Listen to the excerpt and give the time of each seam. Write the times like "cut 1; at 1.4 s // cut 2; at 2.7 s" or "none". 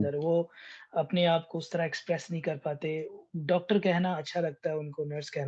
none